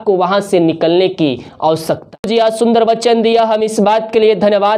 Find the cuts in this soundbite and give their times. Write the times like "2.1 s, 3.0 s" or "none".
2.3 s